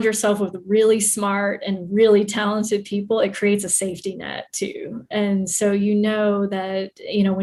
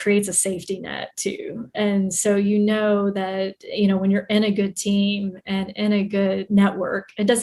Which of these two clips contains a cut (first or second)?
second